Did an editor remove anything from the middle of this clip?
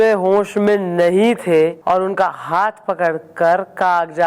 yes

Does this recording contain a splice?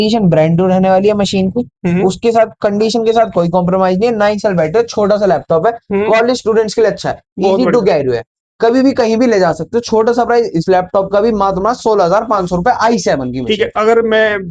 no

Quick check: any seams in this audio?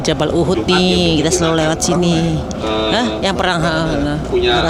no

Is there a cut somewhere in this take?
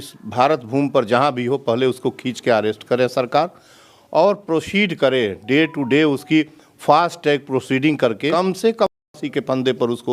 no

